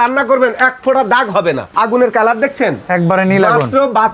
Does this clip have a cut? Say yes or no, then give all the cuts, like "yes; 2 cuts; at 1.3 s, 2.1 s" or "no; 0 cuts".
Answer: yes; 1 cut; at 1.7 s